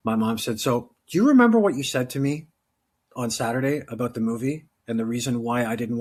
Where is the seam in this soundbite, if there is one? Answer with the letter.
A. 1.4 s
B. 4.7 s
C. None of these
C